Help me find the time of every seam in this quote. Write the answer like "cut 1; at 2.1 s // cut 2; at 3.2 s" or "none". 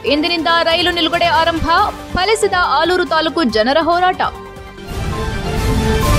cut 1; at 4.7 s

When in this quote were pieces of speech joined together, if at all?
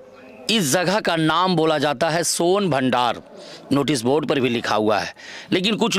none

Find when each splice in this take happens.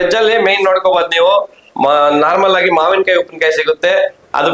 none

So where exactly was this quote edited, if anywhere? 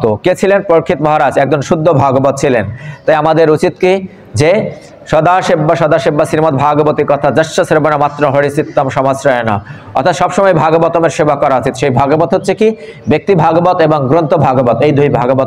none

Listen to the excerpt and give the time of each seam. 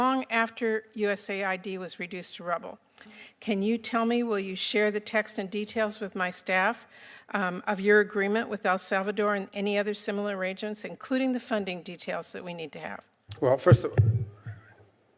cut 1; at 3.2 s

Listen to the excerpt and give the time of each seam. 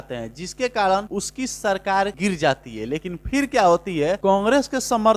cut 1; at 1.1 s // cut 2; at 2.1 s // cut 3; at 4.2 s

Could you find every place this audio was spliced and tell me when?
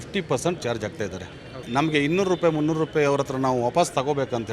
cut 1; at 1.6 s

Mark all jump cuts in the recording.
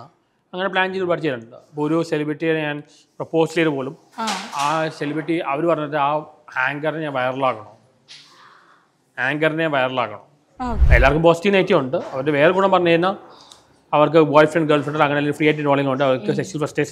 cut 1; at 10.8 s

